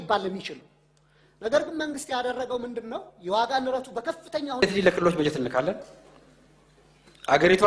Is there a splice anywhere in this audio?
yes; 1 cut; at 4.6 s

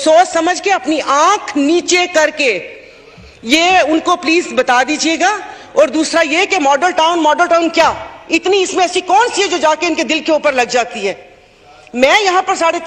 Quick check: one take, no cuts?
yes; 0 cuts

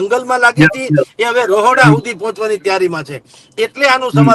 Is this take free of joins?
yes; 0 cuts

